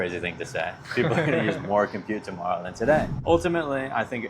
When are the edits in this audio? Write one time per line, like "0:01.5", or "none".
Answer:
0:03.1